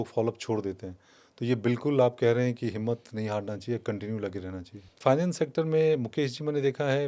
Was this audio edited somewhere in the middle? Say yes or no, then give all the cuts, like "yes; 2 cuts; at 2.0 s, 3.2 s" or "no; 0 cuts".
yes; 1 cut; at 5.0 s